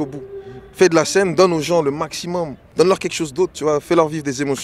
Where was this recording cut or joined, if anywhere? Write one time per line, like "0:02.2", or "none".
0:02.6